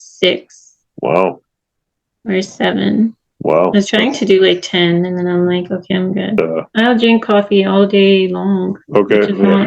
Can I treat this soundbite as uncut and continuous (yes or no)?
no